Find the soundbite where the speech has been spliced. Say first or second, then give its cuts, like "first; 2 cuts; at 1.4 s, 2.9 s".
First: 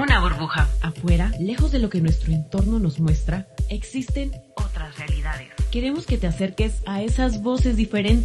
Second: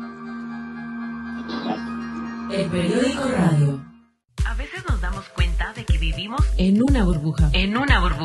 second; 1 cut; at 4.2 s